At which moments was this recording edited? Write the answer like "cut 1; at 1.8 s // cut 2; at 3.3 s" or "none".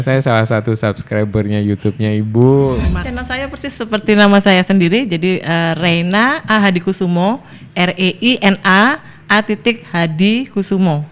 cut 1; at 3.0 s